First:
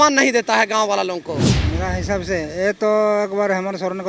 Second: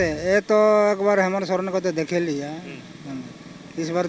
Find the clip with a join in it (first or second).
first